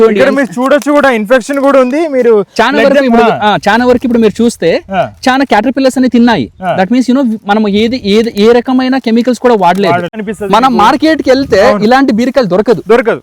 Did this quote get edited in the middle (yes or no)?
yes